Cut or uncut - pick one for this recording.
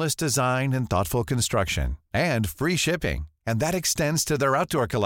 uncut